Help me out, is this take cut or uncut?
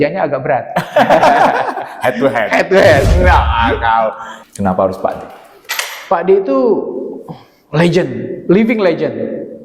cut